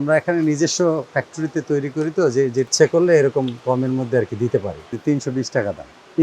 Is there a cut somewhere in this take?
yes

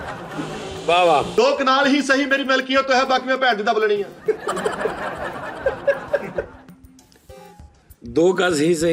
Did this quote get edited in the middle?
yes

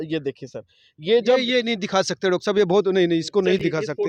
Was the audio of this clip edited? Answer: no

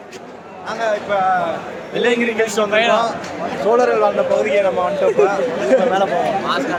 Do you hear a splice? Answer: no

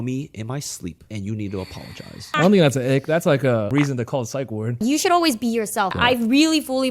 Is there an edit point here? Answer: yes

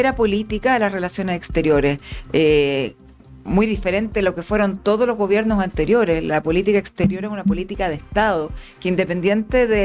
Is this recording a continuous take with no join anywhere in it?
yes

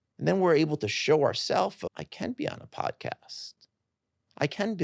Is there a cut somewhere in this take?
yes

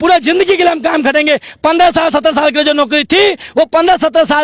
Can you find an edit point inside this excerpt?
no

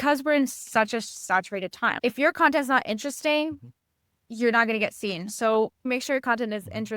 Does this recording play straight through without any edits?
no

